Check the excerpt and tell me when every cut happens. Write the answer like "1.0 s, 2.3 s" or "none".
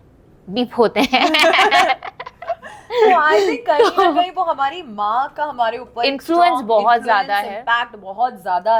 none